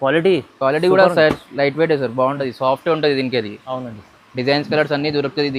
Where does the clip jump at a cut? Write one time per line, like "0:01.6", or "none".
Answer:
none